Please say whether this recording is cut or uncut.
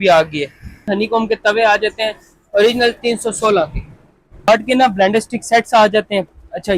cut